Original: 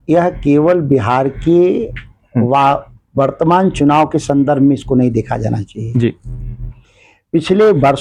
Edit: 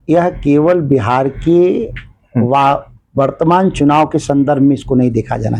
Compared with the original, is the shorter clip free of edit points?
yes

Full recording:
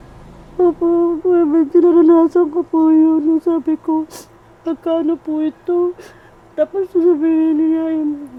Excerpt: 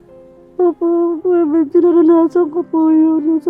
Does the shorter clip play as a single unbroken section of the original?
yes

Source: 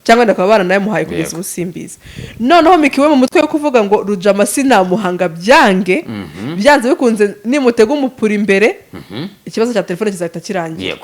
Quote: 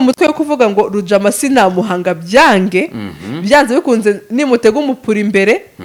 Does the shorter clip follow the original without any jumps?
yes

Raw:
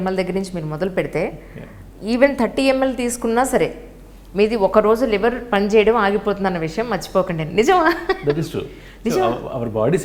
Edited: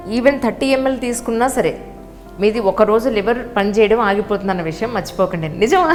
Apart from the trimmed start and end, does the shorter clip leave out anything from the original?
no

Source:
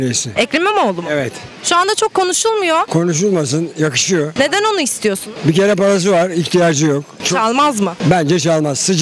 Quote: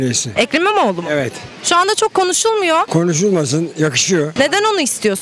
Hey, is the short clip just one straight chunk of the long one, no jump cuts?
yes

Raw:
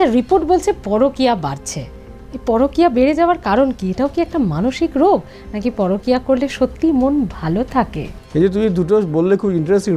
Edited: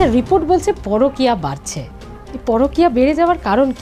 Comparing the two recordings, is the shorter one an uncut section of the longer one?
yes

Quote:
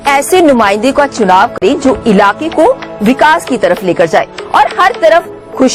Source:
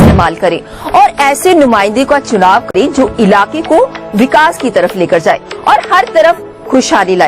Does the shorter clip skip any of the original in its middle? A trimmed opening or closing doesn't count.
no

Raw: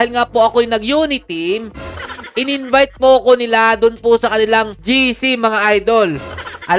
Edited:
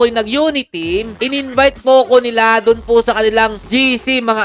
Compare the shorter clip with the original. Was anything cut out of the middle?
yes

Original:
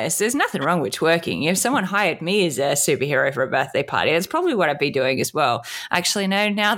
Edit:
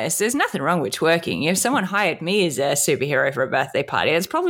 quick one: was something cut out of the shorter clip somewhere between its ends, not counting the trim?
no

